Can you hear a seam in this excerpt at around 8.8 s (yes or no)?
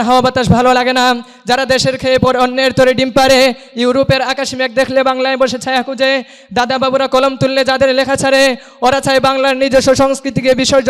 no